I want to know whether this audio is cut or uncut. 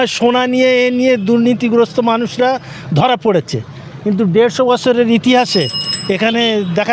uncut